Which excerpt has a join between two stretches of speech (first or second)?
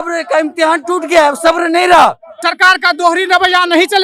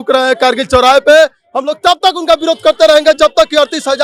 first